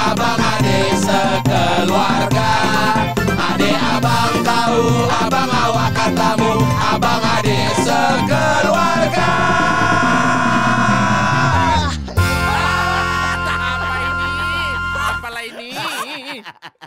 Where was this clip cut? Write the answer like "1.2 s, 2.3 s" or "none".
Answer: none